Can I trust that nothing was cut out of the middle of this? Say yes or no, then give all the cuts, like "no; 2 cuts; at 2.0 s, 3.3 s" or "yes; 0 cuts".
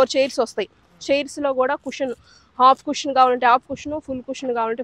yes; 0 cuts